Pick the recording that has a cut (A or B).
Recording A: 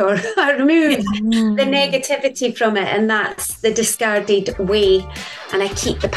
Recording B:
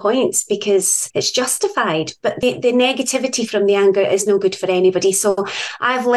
B